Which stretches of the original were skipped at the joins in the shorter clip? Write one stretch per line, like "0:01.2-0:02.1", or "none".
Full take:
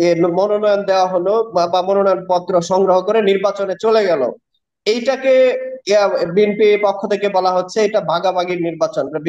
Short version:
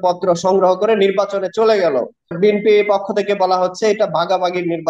0:04.6-0:06.3